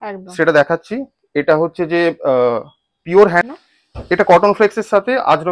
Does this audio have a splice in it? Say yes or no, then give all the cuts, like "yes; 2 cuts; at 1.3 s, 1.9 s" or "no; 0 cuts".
yes; 1 cut; at 3.4 s